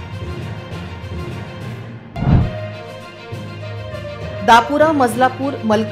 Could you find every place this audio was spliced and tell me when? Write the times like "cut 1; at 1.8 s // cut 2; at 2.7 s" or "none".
cut 1; at 1.8 s